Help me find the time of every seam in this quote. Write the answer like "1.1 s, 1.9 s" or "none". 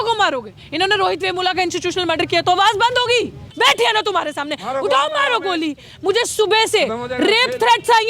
3.4 s